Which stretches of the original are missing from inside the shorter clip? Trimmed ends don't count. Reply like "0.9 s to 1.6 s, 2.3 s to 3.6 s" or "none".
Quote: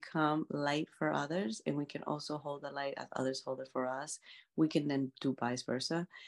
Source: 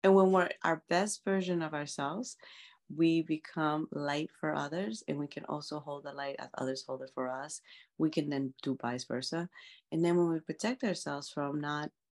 none